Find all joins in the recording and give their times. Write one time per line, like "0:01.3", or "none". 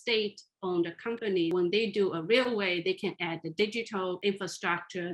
0:01.5
0:04.2